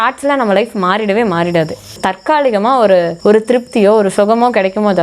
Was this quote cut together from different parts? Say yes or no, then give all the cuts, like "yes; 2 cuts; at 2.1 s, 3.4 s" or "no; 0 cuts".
yes; 2 cuts; at 2.0 s, 3.1 s